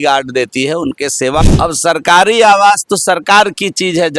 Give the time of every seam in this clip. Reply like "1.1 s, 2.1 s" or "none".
1.4 s